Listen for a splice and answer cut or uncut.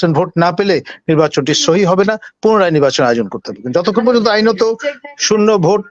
uncut